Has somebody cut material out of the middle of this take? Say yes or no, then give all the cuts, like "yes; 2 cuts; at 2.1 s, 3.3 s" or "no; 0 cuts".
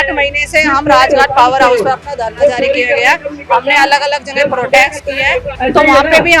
yes; 1 cut; at 5.5 s